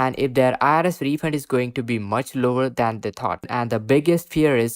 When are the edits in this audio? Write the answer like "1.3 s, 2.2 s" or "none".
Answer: 3.5 s